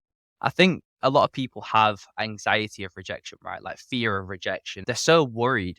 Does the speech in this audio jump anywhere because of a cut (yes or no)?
yes